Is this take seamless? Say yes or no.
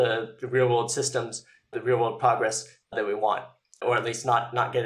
no